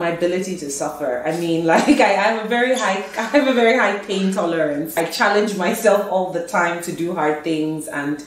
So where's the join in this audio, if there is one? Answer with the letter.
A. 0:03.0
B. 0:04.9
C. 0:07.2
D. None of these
B